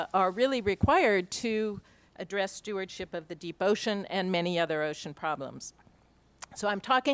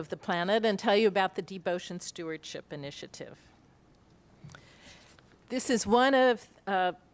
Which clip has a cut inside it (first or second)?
second